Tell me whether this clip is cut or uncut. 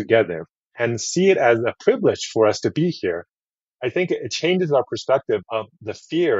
uncut